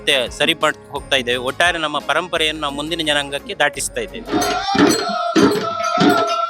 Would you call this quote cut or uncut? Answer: uncut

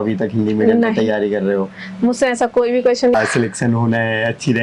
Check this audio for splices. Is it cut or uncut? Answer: cut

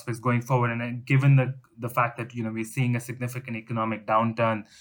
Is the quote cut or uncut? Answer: uncut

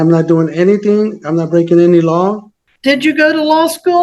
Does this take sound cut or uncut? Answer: cut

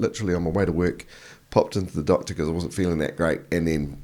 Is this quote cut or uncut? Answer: uncut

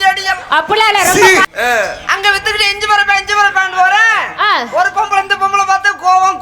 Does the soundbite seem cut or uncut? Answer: cut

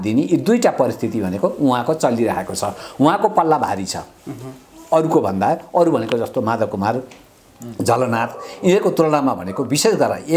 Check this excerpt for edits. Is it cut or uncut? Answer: uncut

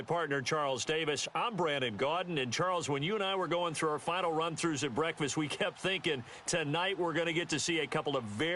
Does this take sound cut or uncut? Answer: uncut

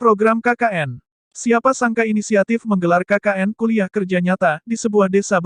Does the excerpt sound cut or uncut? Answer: uncut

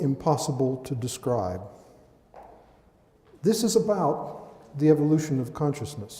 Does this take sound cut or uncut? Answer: cut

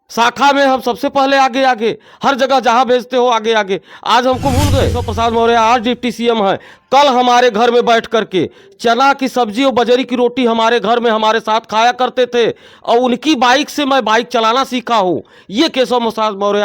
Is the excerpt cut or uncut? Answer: cut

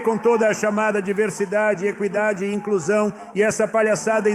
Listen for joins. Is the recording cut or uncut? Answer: uncut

